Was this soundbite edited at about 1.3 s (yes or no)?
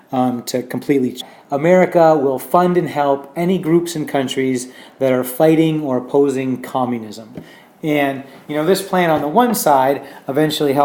no